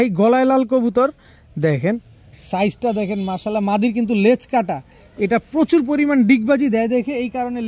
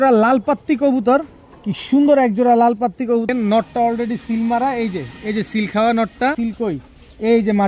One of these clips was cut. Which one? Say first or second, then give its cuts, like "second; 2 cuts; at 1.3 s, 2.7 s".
second; 2 cuts; at 3.3 s, 6.4 s